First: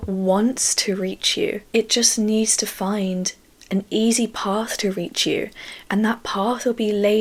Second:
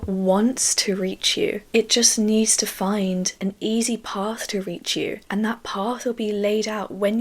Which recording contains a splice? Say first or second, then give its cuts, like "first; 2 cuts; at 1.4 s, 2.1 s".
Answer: second; 2 cuts; at 3.3 s, 5.2 s